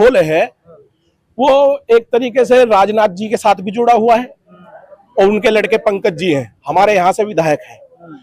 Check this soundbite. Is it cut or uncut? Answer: uncut